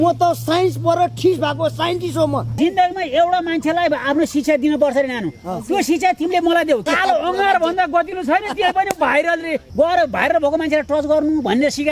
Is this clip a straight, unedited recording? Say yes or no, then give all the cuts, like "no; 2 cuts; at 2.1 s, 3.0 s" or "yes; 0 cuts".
no; 3 cuts; at 2.5 s, 6.8 s, 9.6 s